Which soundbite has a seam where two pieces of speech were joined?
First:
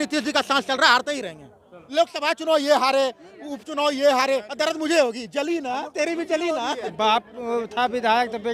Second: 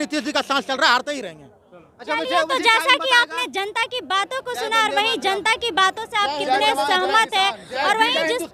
first; 2 cuts; at 1.8 s, 6.8 s

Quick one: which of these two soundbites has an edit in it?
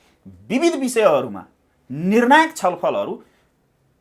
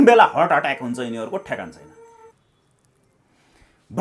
second; 1 cut; at 2.3 s

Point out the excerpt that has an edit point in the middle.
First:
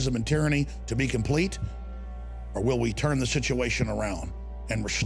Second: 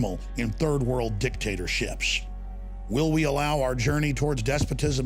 second; 1 cut; at 0.9 s

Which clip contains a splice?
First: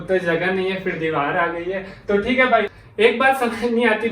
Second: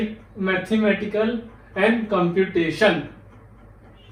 first; 1 cut; at 2.7 s

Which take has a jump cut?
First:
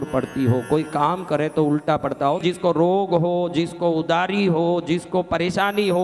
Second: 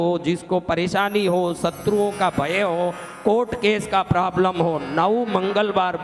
first; 1 cut; at 2.4 s

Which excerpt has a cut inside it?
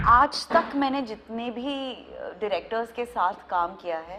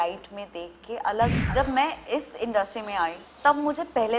second; 2 cuts; at 1.4 s, 3.3 s

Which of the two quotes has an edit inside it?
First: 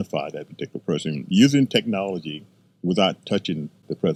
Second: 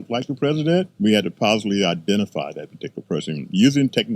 second; 1 cut; at 0.9 s

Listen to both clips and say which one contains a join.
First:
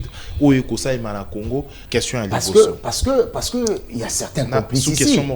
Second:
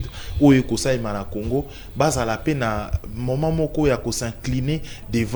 first; 1 cut; at 1.8 s

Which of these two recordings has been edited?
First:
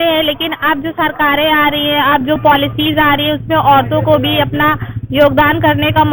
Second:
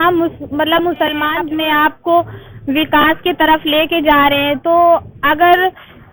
second; 1 cut; at 1.4 s

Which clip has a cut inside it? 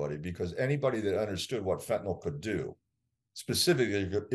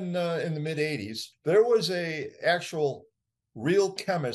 second; 1 cut; at 1.2 s

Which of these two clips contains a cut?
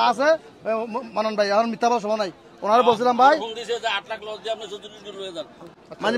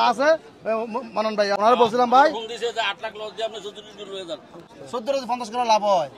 second; 2 cuts; at 1.5 s, 4.8 s

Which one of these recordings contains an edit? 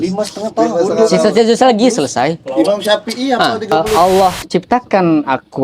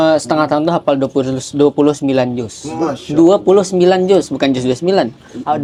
first; 1 cut; at 3.8 s

